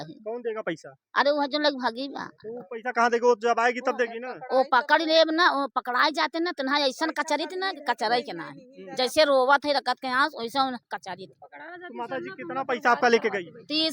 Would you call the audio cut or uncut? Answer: uncut